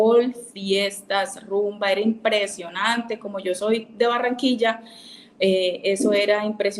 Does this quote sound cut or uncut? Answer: uncut